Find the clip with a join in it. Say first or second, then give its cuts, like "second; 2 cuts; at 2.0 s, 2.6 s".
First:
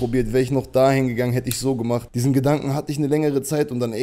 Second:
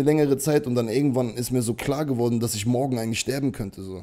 first; 1 cut; at 2.1 s